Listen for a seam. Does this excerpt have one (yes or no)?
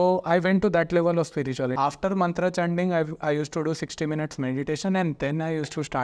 yes